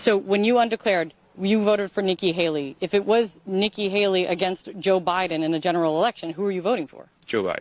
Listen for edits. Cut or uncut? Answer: uncut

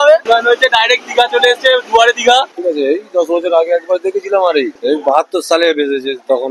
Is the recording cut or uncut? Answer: cut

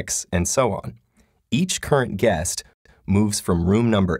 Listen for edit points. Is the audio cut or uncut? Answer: cut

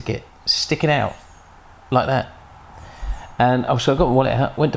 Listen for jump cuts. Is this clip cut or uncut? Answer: uncut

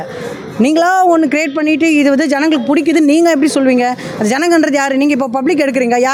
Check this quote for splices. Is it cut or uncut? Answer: uncut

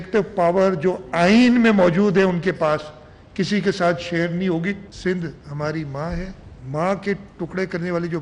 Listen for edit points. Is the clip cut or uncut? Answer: cut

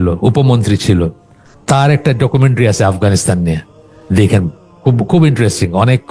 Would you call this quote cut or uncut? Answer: uncut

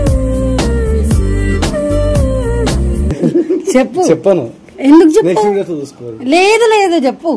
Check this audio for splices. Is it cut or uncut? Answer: uncut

